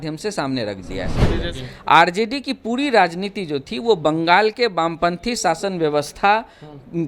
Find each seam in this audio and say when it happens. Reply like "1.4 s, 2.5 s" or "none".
1.2 s